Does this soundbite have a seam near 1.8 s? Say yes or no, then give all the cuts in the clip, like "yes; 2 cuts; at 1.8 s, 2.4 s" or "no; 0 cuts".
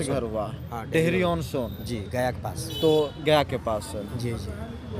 no; 0 cuts